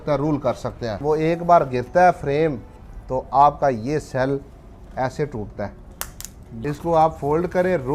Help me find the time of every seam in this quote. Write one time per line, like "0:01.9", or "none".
0:01.0
0:06.5